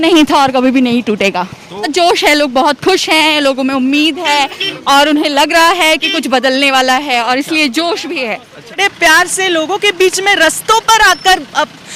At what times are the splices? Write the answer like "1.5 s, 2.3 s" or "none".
1.9 s, 8.8 s